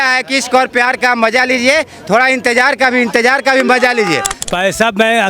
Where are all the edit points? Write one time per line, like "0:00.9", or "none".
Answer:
0:04.3